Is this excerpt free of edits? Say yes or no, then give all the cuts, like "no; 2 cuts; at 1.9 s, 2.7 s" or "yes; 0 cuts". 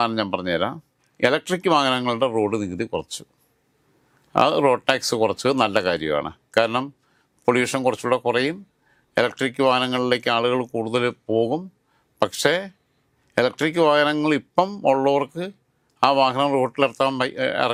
yes; 0 cuts